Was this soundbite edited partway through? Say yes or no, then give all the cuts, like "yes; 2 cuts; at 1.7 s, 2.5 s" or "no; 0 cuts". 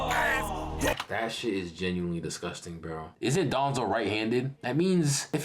yes; 1 cut; at 3.1 s